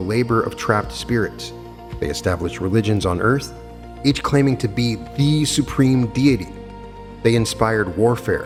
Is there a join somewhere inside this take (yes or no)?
no